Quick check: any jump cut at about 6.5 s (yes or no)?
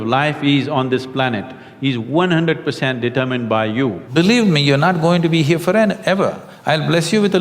no